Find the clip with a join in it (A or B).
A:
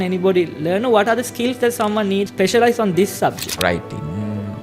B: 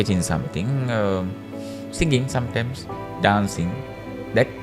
A